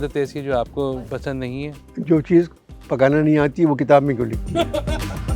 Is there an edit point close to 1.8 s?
yes; 1 cut; at 1.8 s

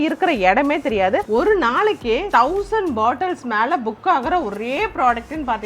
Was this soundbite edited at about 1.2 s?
yes; 2 cuts; at 1.2 s, 2.3 s

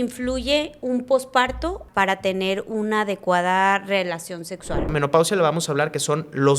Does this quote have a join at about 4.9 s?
yes; 2 cuts; at 1.8 s, 4.9 s

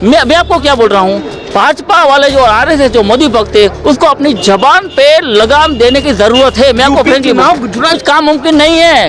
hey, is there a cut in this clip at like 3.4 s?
no; 1 cut; at 7.9 s

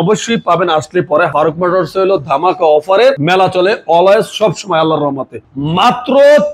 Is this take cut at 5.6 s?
yes; 3 cuts; at 1.3 s, 3.2 s, 5.6 s

